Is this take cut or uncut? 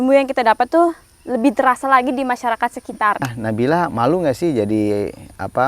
cut